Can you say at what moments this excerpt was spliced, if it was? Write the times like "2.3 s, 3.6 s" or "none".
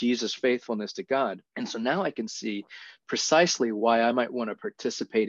1.5 s